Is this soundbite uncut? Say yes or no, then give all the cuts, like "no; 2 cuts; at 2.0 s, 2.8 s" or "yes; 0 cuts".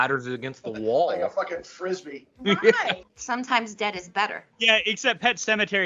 no; 2 cuts; at 3.1 s, 4.5 s